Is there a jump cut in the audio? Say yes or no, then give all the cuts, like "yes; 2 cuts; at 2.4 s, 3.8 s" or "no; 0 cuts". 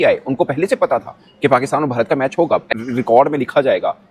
yes; 1 cut; at 2.8 s